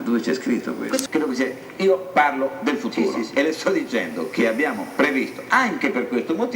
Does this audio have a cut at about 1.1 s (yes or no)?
yes